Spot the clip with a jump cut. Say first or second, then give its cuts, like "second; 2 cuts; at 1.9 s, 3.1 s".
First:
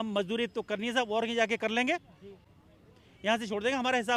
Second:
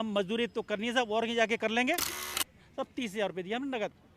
second; 1 cut; at 2.7 s